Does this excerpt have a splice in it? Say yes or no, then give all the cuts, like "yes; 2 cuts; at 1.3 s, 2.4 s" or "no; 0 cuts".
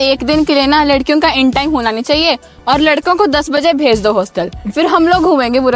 no; 0 cuts